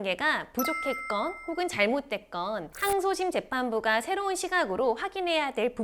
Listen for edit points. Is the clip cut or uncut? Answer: uncut